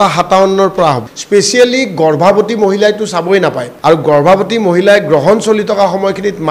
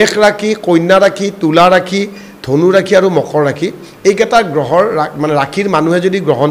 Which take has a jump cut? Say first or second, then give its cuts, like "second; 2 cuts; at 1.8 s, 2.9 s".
first; 2 cuts; at 1.1 s, 3.7 s